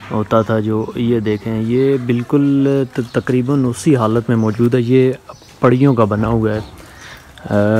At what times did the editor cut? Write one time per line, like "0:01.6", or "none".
none